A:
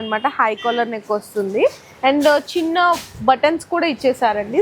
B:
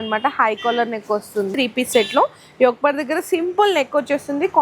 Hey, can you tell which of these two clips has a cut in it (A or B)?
B